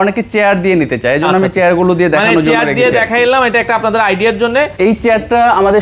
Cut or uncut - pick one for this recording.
cut